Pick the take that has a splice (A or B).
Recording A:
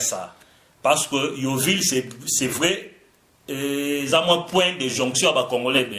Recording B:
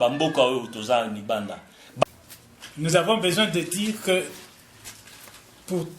B